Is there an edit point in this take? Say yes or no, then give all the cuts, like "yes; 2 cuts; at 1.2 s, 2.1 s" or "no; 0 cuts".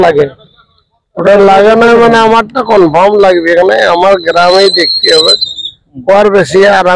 no; 0 cuts